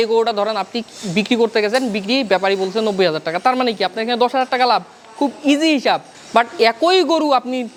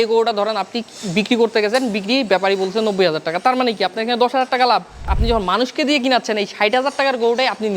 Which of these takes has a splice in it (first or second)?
second